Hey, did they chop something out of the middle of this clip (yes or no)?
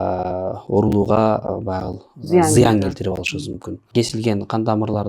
yes